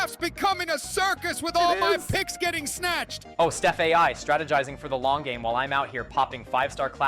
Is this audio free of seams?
no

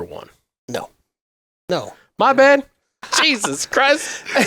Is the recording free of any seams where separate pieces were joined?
no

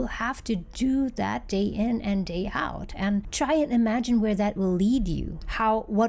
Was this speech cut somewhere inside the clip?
no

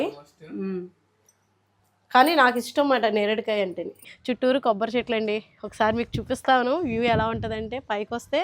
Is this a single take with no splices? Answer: no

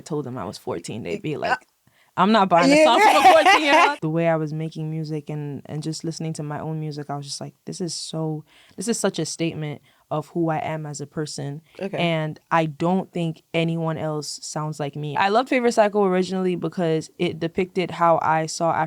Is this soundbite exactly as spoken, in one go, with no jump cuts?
no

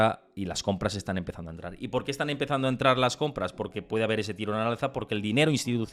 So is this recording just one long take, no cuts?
yes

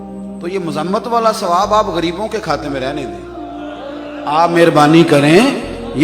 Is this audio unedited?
yes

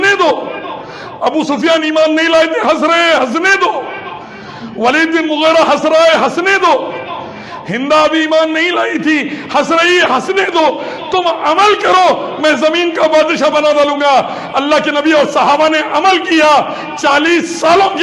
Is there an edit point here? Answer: no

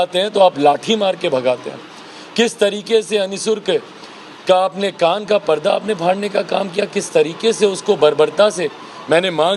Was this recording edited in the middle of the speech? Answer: no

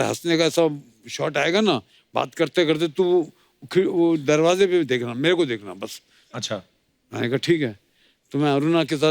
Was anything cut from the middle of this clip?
no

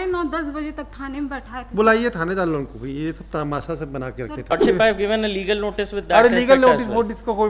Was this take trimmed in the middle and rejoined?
yes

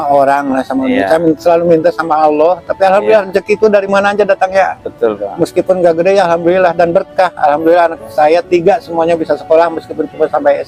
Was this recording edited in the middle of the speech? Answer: no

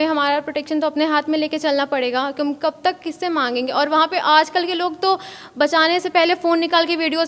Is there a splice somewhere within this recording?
no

